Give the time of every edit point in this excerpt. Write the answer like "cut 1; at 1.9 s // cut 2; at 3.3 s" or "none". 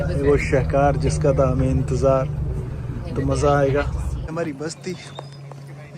none